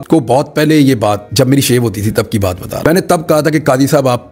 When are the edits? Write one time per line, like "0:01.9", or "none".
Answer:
0:02.7